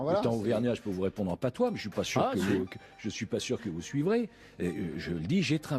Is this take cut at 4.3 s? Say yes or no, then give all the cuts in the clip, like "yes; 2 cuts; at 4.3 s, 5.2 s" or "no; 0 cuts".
no; 1 cut; at 1.8 s